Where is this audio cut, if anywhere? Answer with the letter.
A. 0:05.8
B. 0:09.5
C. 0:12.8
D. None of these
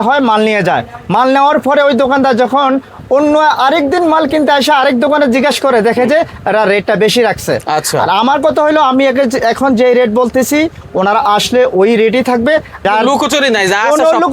C